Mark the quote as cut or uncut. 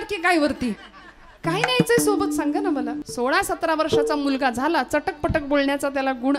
cut